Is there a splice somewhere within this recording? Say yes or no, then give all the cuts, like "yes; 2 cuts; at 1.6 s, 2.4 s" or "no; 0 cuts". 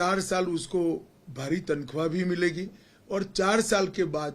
no; 0 cuts